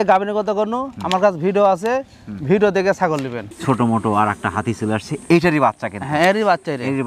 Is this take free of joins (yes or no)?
no